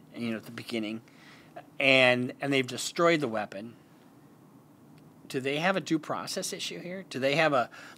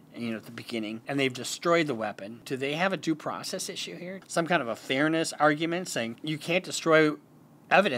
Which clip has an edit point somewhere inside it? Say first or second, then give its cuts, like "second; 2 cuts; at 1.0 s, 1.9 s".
second; 4 cuts; at 1.0 s, 2.3 s, 4.1 s, 6.2 s